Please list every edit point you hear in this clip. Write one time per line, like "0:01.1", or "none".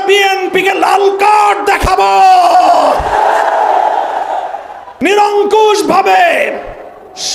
0:05.1